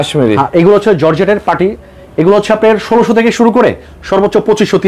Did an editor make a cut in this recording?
no; 0 cuts

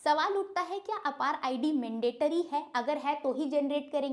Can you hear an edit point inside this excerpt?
no; 0 cuts

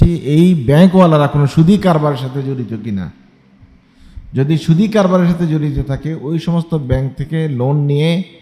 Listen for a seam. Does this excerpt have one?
no; 0 cuts

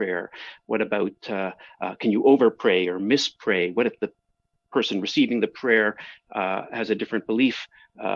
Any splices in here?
no; 0 cuts

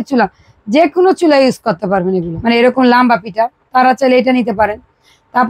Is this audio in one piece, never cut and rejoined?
no; 1 cut; at 2.3 s

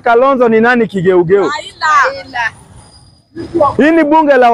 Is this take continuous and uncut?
yes; 0 cuts

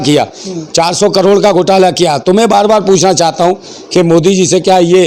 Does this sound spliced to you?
no; 0 cuts

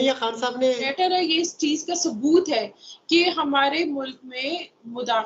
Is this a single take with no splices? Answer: no; 1 cut; at 0.9 s

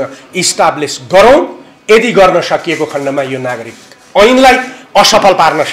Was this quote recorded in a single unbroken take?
yes; 0 cuts

